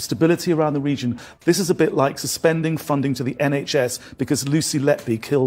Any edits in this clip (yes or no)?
yes